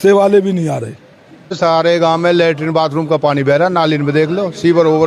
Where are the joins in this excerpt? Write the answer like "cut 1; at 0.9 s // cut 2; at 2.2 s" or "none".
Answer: cut 1; at 1.6 s

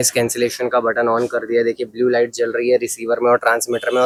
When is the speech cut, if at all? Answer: none

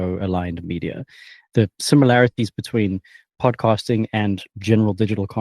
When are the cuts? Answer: cut 1; at 1.5 s

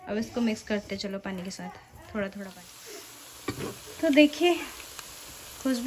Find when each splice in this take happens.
cut 1; at 2.5 s

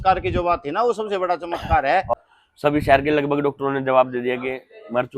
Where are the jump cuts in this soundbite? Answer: cut 1; at 2.1 s

